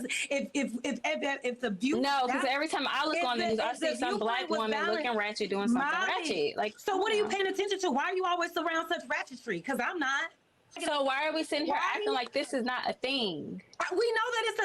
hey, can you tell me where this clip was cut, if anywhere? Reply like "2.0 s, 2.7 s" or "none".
10.8 s